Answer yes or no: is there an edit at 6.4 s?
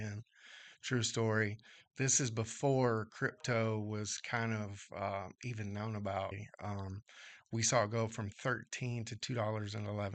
yes